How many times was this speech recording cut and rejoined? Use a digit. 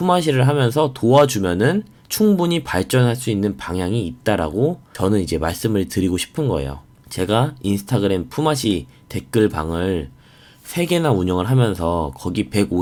0